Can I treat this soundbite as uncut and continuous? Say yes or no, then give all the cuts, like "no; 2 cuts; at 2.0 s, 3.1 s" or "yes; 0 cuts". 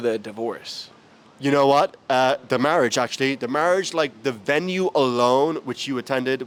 yes; 0 cuts